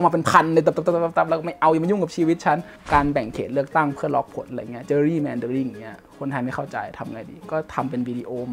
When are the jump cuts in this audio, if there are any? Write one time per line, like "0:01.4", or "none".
0:02.7